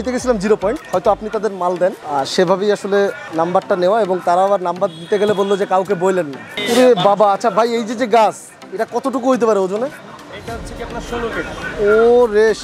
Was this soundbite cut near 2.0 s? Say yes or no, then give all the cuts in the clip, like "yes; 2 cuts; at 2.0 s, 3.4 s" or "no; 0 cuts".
yes; 4 cuts; at 0.8 s, 2.0 s, 3.2 s, 6.6 s